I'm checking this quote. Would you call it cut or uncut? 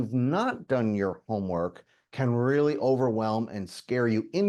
uncut